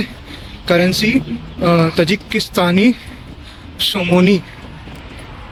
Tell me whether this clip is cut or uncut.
uncut